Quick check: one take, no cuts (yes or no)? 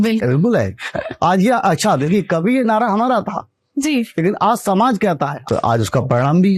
no